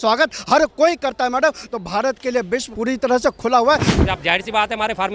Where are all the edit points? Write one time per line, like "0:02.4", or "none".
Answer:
0:02.7
0:03.9